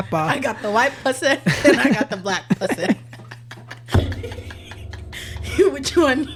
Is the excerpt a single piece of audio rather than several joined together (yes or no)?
yes